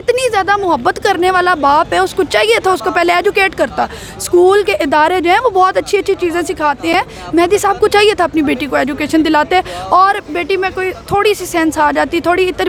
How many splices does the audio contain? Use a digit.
0